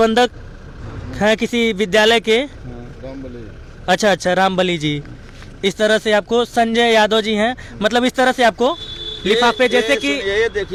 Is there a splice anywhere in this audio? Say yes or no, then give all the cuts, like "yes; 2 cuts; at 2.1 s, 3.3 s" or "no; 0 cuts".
no; 0 cuts